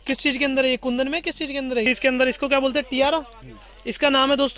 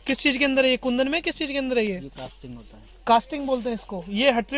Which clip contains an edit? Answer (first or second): first